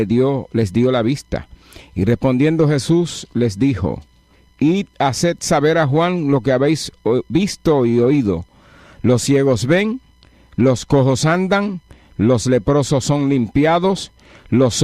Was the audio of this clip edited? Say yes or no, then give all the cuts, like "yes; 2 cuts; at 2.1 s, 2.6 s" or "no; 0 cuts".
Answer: yes; 1 cut; at 1.0 s